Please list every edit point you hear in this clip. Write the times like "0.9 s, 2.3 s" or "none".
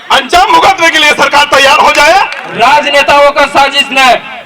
2.4 s